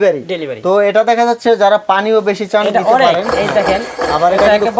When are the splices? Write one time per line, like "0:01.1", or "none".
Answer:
none